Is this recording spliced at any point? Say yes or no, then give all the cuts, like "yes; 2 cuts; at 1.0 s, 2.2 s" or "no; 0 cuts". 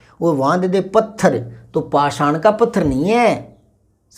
no; 0 cuts